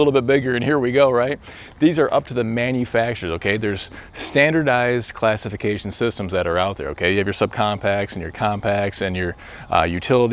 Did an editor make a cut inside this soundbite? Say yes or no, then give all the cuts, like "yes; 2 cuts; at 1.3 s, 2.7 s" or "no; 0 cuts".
no; 0 cuts